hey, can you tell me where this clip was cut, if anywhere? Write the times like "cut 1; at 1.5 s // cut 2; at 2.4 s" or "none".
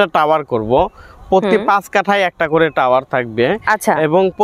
none